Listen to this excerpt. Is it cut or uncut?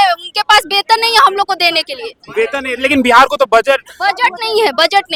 uncut